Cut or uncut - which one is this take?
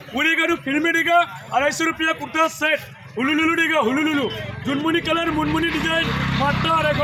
uncut